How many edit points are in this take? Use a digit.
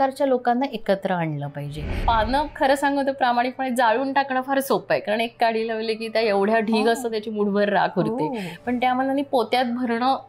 1